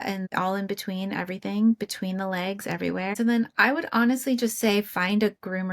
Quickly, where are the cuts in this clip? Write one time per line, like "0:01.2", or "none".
0:03.1